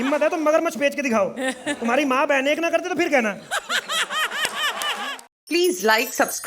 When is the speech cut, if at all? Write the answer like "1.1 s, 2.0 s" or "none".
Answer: 5.1 s